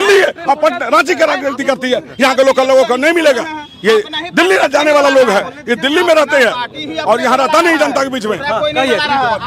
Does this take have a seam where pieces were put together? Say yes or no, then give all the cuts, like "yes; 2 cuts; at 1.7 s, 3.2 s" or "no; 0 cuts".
no; 0 cuts